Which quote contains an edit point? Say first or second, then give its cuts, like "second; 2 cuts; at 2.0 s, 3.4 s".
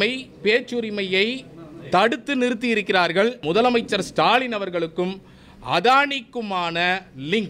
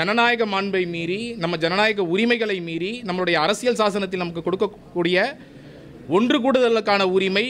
first; 1 cut; at 3.4 s